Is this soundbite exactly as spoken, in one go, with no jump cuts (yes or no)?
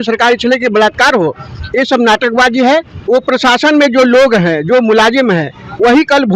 no